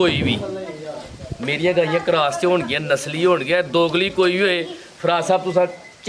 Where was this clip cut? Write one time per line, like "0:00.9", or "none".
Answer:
none